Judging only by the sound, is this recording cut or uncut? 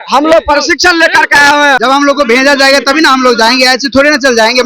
cut